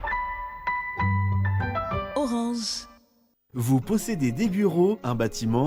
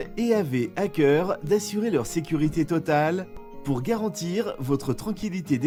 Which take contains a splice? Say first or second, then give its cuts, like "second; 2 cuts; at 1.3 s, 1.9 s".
first; 1 cut; at 3.3 s